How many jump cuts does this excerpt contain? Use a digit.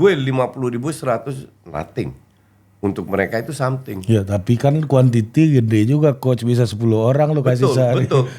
0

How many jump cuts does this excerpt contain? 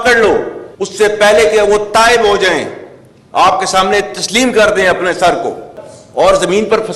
1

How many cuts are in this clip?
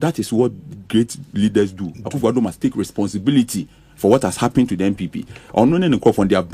0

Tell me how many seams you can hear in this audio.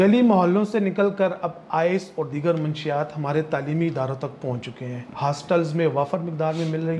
0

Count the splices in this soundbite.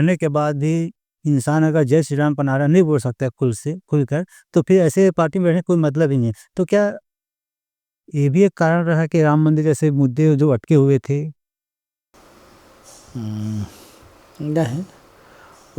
0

